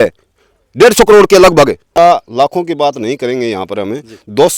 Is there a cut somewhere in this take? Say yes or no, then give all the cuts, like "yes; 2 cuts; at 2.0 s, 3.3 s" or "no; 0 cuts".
yes; 1 cut; at 1.9 s